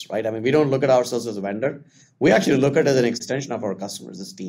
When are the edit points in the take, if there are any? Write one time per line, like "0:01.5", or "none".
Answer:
0:03.2